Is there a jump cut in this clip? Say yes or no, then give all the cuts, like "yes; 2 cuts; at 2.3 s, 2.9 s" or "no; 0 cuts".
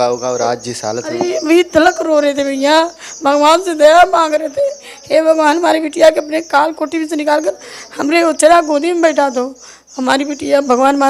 no; 0 cuts